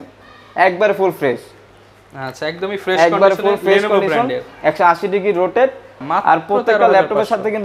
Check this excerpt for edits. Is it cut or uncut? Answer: cut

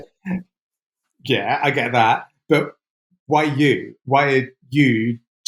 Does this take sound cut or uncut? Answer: uncut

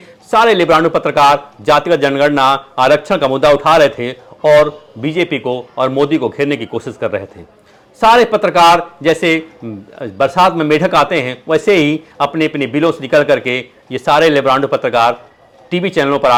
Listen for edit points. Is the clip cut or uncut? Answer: uncut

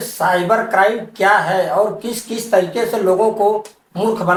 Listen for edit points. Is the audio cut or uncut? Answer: uncut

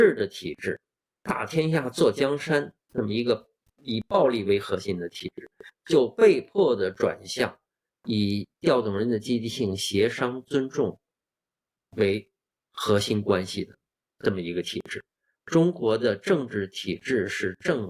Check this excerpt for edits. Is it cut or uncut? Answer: uncut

